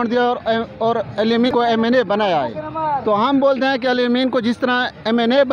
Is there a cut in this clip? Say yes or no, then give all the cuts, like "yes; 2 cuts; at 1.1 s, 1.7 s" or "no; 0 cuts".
yes; 1 cut; at 1.5 s